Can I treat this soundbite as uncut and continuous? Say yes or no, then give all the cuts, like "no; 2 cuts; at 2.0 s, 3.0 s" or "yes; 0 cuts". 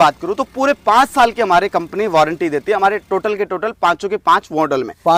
yes; 0 cuts